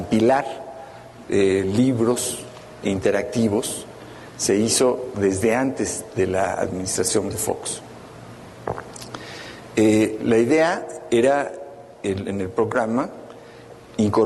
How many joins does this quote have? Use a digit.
1